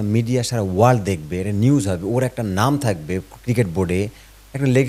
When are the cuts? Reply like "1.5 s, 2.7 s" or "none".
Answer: none

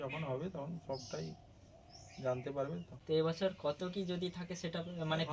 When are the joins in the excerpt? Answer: 2.9 s

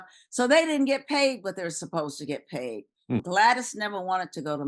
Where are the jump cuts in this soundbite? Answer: 3.2 s

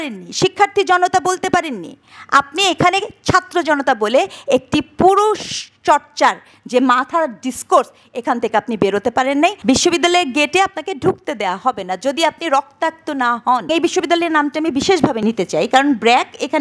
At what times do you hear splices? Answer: 9.6 s, 13.7 s, 15.2 s

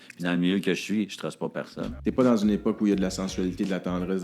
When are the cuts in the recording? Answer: 1.8 s

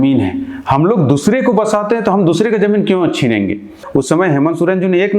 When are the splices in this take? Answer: 3.8 s

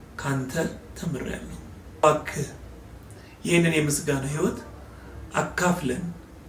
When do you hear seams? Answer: 2.0 s

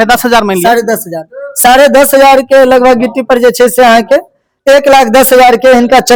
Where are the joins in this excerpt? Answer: none

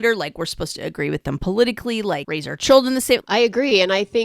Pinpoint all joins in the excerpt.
2.3 s, 3.2 s

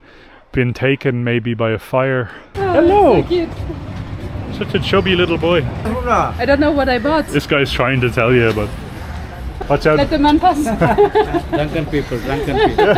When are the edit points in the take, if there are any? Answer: 2.4 s, 5.9 s, 9.6 s

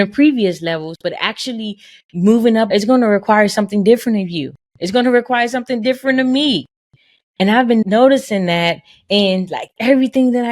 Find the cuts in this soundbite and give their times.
2.7 s, 7.8 s

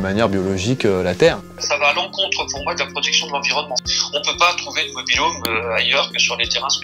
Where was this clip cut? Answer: 1.5 s, 3.9 s

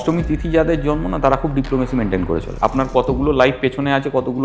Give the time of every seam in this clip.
2.5 s

